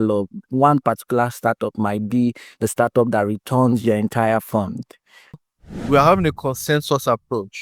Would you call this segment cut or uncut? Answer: cut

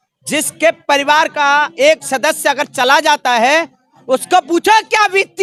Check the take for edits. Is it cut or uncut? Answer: uncut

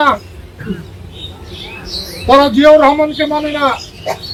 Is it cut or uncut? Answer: uncut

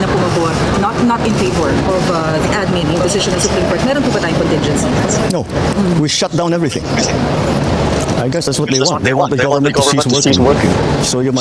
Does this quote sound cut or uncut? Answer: uncut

